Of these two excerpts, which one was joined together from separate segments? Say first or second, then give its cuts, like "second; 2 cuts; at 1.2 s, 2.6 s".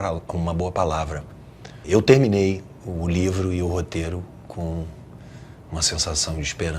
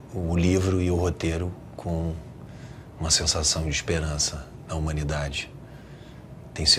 first; 1 cut; at 1.8 s